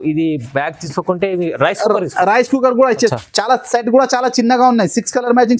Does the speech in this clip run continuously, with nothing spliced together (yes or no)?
no